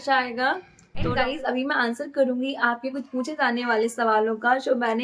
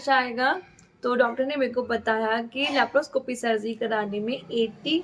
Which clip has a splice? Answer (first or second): first